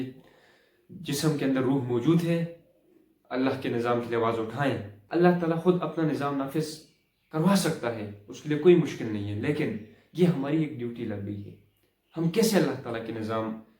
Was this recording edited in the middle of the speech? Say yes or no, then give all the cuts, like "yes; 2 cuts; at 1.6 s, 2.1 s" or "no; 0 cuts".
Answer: yes; 1 cut; at 5.0 s